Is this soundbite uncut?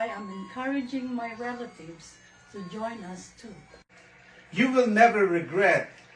no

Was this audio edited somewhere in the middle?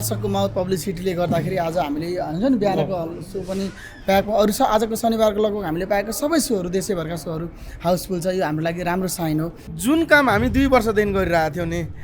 yes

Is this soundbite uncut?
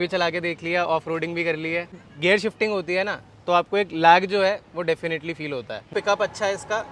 no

